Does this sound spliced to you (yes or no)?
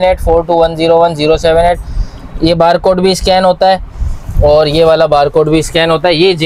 no